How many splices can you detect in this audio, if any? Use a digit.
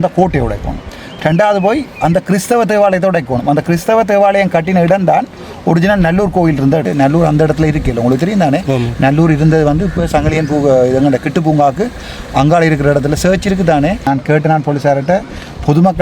2